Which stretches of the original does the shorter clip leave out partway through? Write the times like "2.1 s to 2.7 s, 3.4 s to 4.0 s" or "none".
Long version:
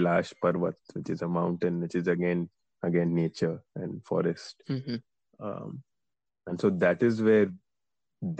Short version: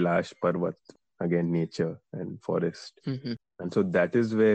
0.9 s to 2.6 s, 5.1 s to 6.4 s